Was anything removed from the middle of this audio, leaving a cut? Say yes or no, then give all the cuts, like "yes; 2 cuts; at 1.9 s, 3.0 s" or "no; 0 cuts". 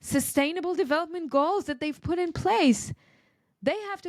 no; 0 cuts